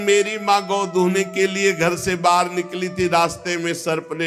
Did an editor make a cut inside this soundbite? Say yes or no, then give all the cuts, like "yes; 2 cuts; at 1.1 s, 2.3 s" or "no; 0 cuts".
no; 0 cuts